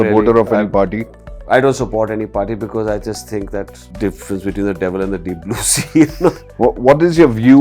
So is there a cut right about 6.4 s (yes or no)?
yes